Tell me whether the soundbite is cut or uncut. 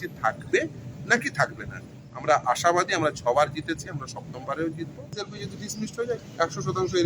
cut